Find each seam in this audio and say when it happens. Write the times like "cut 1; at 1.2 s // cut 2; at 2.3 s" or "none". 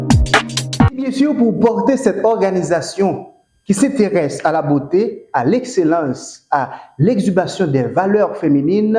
cut 1; at 1.0 s